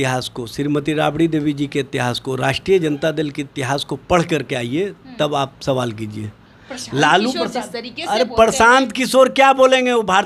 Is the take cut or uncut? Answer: uncut